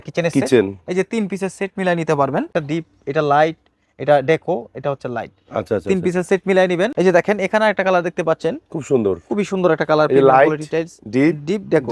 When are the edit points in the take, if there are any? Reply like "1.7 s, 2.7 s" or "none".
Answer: 2.5 s, 6.9 s